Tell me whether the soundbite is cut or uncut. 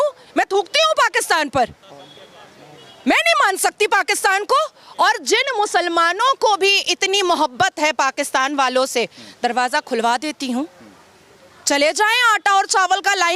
uncut